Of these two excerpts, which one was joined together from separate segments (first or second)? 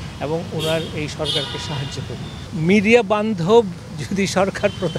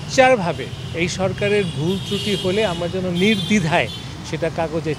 first